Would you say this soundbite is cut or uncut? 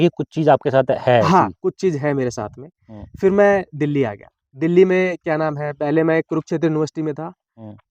uncut